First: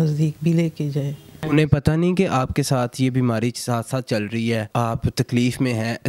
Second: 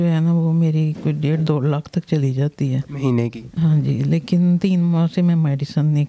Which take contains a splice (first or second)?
first